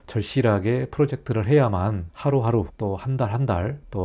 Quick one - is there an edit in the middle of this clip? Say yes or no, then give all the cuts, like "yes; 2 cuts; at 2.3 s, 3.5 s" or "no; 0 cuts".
no; 0 cuts